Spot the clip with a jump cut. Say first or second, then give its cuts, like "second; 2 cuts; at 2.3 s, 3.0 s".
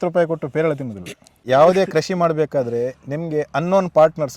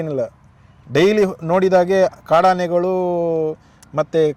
first; 1 cut; at 1.4 s